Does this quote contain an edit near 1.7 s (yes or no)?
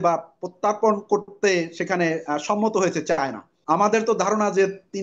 no